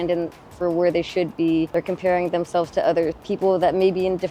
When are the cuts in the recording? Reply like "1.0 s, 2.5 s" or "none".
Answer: 1.7 s, 3.2 s